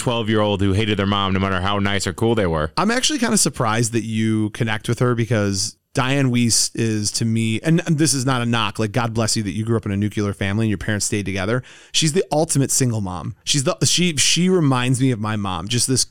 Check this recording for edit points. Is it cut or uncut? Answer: uncut